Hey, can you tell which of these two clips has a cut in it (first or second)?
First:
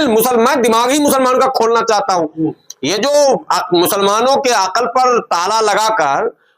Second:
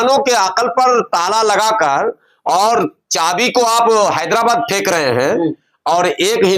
first